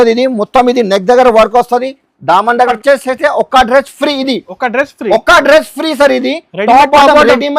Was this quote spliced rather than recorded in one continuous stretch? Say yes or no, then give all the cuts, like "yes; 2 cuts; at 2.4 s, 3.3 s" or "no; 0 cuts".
yes; 1 cut; at 2.8 s